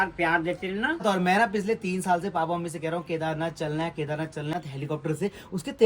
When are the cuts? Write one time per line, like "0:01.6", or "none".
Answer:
0:01.0
0:04.5